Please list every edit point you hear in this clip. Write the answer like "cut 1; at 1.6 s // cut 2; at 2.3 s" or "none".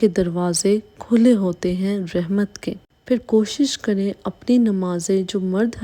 none